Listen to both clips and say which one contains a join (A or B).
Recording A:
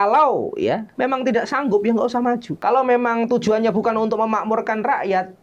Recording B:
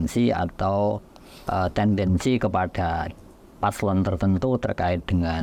A